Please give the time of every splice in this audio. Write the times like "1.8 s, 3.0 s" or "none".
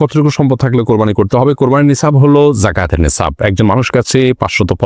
none